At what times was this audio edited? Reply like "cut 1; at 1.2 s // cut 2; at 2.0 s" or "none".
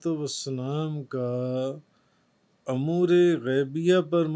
none